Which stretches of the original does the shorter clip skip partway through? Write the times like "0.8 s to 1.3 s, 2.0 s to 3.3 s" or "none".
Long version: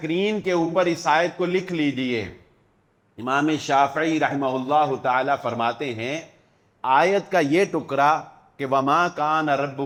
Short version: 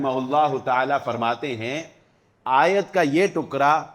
none